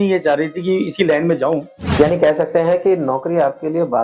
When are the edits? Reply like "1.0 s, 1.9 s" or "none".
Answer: 1.8 s